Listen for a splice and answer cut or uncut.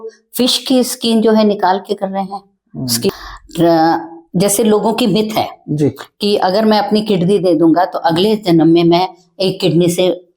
cut